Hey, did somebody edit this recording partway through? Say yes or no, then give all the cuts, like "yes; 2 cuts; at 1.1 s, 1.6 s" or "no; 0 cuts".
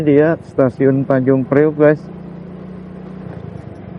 yes; 1 cut; at 2.0 s